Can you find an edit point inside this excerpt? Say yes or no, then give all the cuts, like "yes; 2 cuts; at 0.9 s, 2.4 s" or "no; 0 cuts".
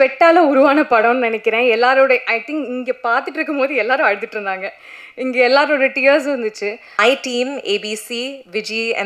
yes; 1 cut; at 6.8 s